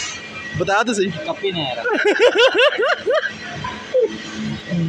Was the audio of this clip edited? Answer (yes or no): yes